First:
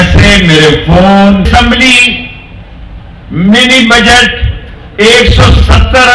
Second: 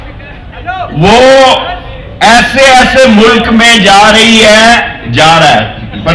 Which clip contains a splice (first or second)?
first